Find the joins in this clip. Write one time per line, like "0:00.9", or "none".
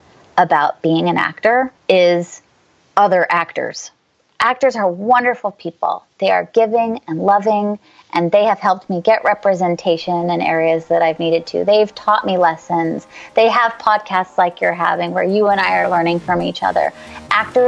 0:01.8